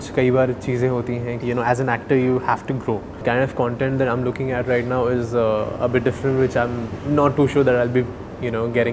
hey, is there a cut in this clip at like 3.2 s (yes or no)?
yes